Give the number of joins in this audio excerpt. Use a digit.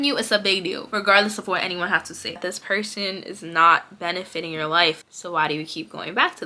2